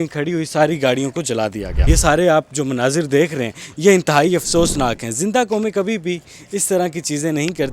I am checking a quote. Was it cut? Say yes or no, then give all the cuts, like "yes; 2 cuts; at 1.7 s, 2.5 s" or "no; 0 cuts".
yes; 1 cut; at 1.7 s